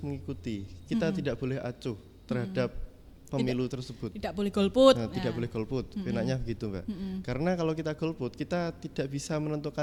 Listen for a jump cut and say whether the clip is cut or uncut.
uncut